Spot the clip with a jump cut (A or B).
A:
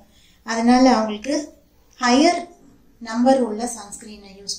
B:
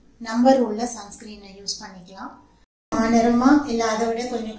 B